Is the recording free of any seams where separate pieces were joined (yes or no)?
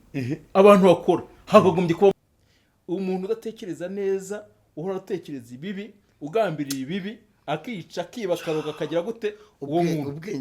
no